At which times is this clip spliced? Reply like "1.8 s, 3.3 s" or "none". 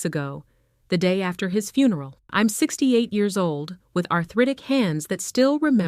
2.2 s